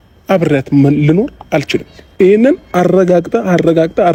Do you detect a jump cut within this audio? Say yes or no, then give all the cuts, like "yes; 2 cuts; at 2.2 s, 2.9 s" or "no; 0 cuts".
no; 0 cuts